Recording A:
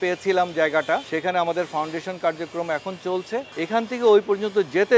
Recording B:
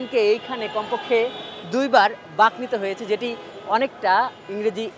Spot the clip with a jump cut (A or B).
A